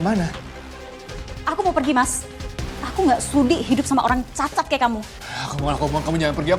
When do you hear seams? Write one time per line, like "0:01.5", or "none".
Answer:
none